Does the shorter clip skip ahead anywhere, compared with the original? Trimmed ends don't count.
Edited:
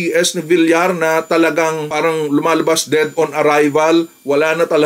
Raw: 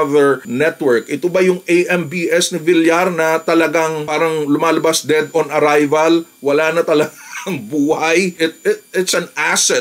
no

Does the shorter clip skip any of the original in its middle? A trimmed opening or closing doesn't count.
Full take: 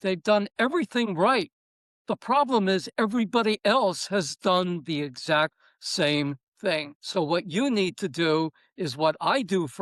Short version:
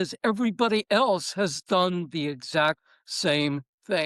no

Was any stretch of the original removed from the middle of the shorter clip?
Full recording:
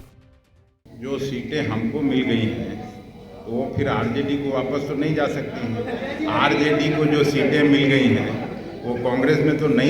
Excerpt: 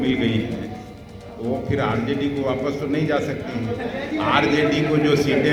no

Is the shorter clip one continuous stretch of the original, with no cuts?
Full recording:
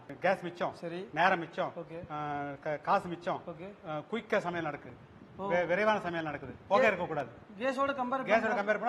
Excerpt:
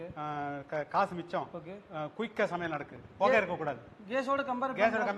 no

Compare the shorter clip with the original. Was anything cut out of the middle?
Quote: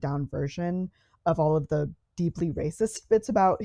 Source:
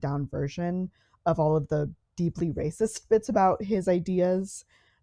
no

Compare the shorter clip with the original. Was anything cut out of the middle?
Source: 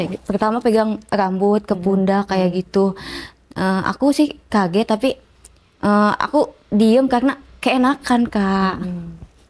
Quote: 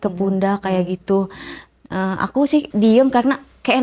yes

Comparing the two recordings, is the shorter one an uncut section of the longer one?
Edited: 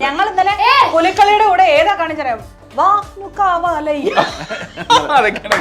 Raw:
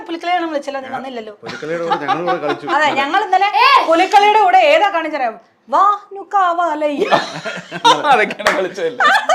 yes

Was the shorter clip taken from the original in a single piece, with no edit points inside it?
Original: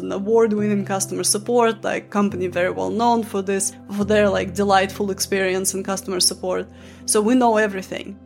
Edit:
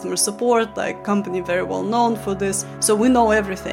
no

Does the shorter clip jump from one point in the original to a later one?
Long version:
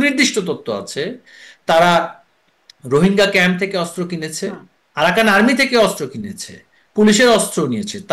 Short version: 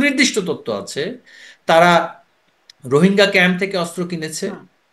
no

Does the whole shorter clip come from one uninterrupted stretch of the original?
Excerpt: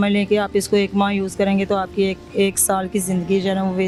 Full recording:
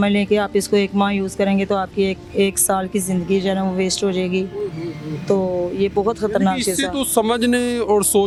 yes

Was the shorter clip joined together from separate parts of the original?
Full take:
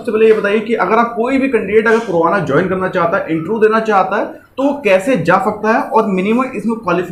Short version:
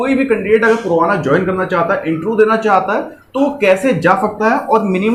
no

